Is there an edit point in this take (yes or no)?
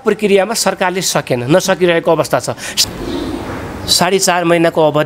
yes